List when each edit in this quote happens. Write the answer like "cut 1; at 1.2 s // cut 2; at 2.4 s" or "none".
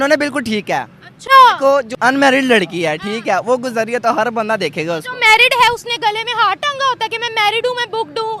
cut 1; at 1.9 s